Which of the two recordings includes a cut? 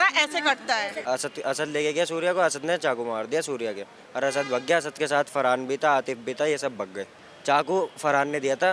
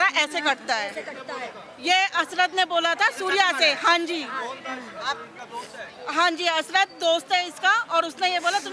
first; 2 cuts; at 1.0 s, 7.3 s

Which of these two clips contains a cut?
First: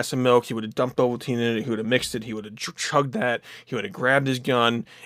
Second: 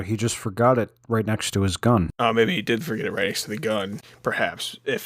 second; 2 cuts; at 2.1 s, 4.0 s

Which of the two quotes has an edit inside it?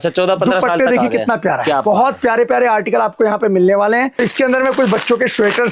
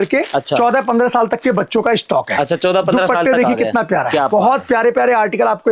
first; 1 cut; at 4.2 s

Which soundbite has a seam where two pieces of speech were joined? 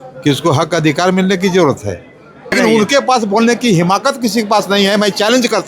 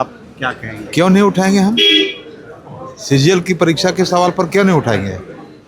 first; 1 cut; at 2.5 s

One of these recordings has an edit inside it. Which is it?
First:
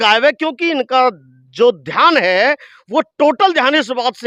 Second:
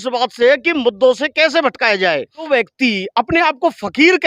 second; 1 cut; at 2.5 s

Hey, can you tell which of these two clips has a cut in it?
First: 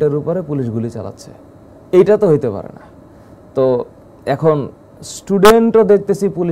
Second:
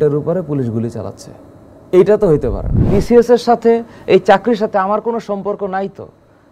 second; 1 cut; at 2.8 s

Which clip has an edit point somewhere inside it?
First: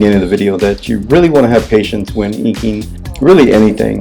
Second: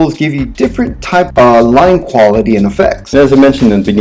second; 1 cut; at 3.0 s

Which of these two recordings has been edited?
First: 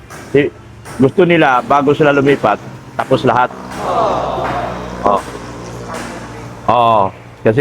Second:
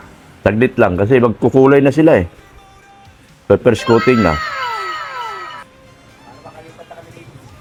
first; 2 cuts; at 3.6 s, 4.9 s

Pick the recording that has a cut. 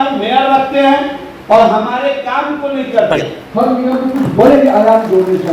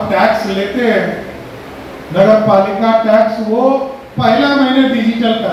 first; 1 cut; at 3.4 s

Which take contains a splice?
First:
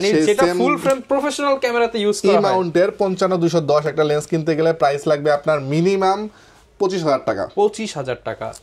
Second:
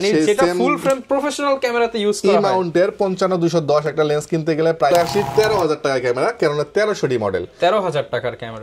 second; 1 cut; at 4.9 s

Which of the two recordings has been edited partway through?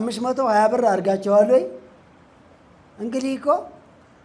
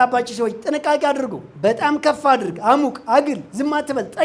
second; 1 cut; at 1.4 s

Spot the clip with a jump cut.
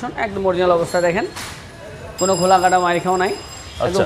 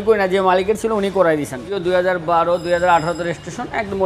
second; 1 cut; at 1.6 s

